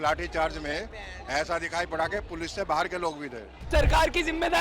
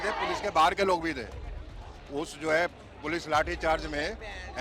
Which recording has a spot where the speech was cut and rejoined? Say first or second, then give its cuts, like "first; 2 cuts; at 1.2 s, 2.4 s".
first; 1 cut; at 3.7 s